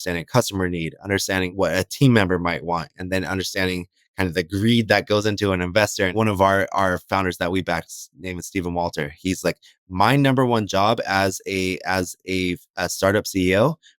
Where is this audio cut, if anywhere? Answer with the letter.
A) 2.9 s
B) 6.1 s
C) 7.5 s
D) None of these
B